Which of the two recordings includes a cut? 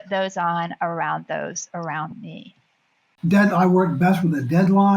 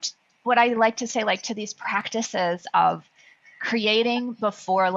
first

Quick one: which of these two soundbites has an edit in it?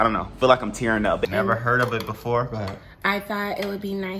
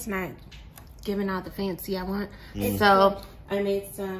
first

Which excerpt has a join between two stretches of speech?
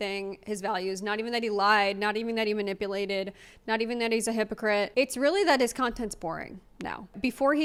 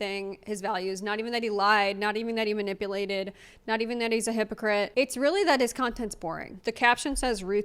second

